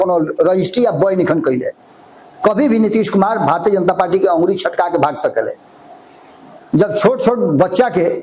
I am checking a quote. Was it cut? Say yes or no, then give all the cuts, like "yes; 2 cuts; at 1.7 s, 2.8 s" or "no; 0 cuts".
no; 0 cuts